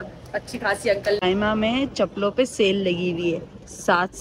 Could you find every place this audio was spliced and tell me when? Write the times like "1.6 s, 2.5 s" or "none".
1.2 s